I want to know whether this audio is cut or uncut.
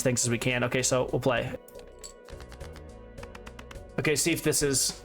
cut